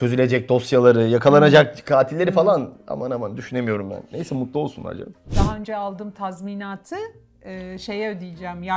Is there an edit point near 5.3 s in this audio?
yes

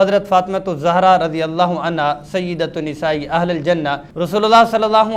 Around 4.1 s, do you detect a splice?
yes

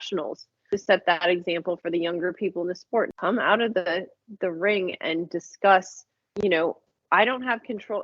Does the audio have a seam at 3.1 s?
yes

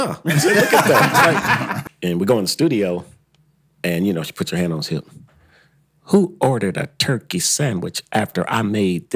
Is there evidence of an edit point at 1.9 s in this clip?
yes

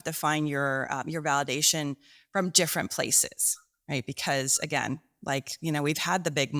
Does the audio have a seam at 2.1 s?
no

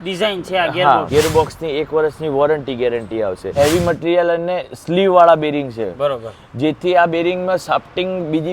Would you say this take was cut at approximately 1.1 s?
yes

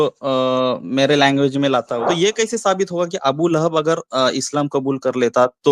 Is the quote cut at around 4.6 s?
no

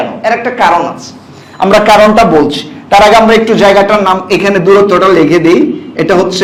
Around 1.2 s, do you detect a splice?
no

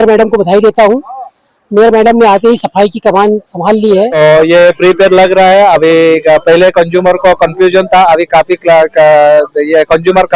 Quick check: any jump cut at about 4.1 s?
yes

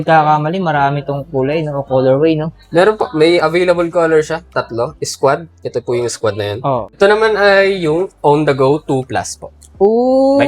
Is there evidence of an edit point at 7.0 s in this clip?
yes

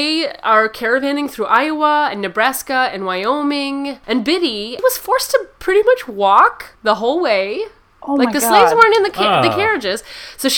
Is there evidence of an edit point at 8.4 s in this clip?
no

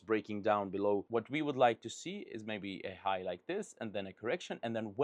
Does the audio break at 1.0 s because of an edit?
yes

